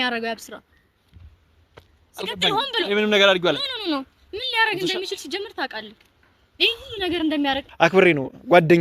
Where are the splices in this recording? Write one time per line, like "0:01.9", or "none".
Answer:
0:07.6

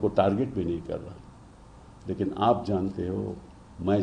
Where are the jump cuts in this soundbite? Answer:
none

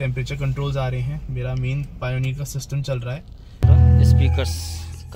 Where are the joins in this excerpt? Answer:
0:03.6

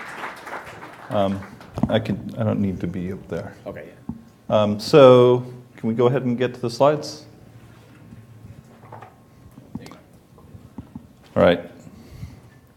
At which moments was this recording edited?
0:06.5

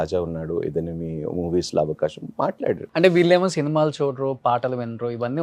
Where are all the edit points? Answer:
0:02.8
0:04.4

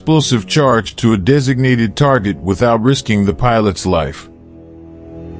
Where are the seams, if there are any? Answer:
0:04.2

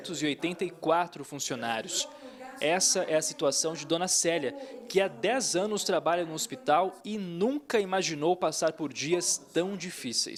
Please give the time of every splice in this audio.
none

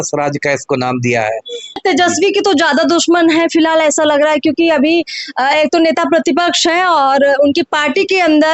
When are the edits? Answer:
0:01.8

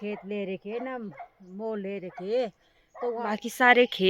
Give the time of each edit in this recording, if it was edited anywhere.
0:03.2

